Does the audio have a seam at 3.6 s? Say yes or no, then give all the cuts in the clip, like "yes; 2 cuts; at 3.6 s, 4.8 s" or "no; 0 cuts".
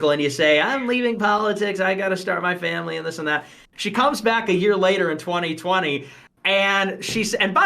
yes; 1 cut; at 3.6 s